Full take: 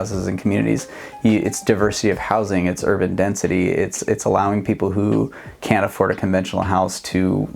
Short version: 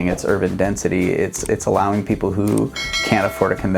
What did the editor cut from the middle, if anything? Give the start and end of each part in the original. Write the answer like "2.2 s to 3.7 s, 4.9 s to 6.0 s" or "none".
none